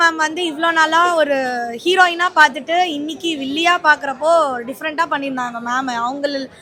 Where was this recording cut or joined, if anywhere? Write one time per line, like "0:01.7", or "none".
none

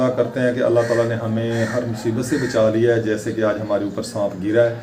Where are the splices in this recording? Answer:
none

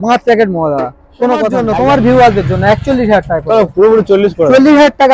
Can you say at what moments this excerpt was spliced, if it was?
0:01.6

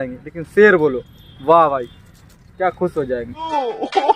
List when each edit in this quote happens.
none

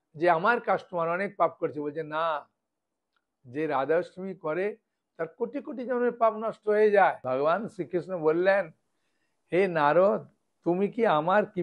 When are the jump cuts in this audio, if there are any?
0:07.2

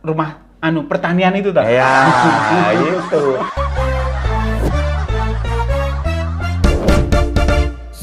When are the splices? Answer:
0:03.5

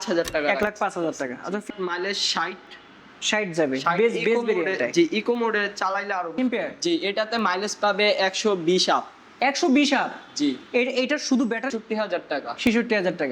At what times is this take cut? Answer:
0:01.6
0:06.4
0:11.7

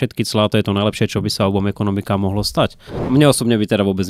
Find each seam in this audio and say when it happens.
0:03.0

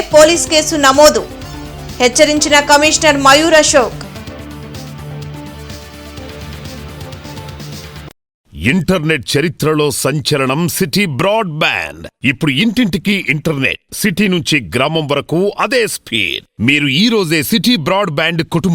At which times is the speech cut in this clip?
0:08.5

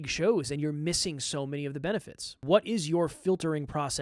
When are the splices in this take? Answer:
0:02.4

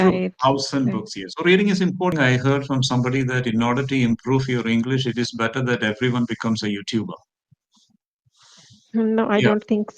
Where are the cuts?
0:02.1

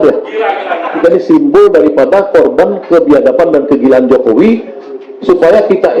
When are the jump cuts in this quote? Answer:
0:00.9

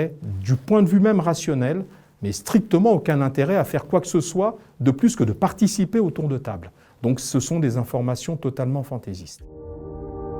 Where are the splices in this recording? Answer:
0:09.3

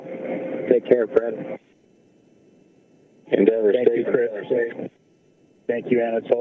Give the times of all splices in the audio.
0:01.7
0:03.2

